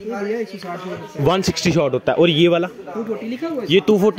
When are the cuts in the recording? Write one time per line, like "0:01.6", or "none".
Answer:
none